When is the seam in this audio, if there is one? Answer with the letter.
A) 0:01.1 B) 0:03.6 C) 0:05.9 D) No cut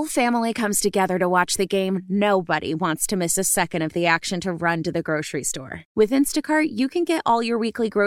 D